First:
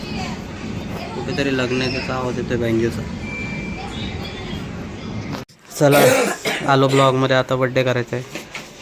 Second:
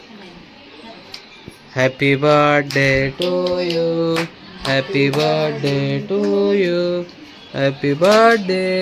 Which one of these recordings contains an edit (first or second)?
first